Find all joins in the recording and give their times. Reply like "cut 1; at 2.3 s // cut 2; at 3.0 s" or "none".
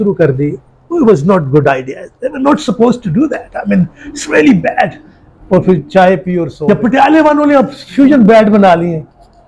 cut 1; at 6.5 s